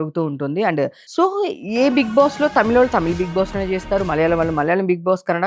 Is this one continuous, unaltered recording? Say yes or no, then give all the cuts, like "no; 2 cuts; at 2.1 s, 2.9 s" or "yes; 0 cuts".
no; 1 cut; at 1.0 s